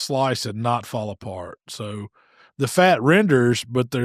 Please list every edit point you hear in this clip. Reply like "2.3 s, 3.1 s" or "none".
none